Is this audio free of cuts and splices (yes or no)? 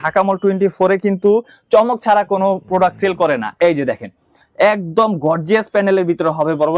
yes